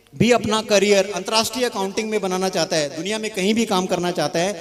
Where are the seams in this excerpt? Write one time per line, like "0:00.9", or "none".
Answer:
none